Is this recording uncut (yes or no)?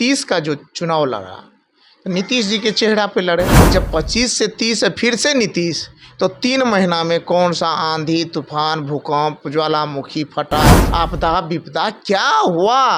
no